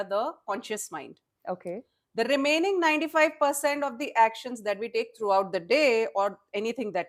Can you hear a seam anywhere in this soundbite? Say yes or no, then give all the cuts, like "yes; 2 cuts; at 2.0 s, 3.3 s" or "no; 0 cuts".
no; 0 cuts